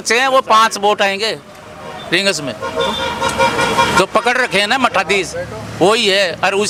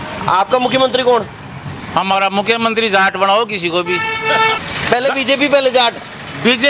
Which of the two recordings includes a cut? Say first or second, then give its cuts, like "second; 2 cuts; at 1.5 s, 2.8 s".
second; 1 cut; at 4.7 s